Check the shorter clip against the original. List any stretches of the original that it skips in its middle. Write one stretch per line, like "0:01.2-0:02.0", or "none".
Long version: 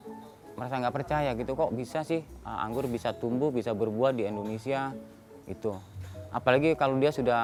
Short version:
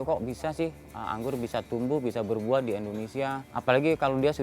0:05.0-0:06.3